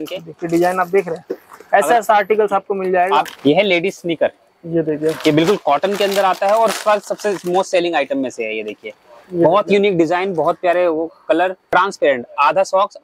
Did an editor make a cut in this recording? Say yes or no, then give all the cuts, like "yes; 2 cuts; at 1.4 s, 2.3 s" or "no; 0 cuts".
yes; 2 cuts; at 3.3 s, 11.6 s